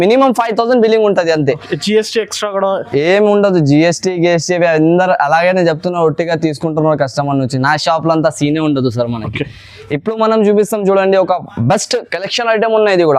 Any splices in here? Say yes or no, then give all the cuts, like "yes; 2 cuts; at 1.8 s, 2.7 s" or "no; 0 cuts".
no; 0 cuts